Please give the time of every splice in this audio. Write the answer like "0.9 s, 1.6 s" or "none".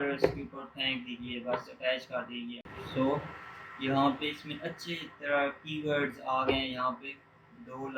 2.6 s